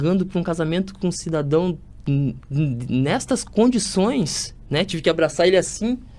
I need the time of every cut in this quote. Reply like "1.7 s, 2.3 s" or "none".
2.4 s